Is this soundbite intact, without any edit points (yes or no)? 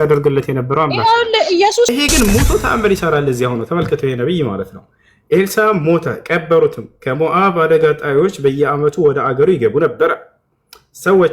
no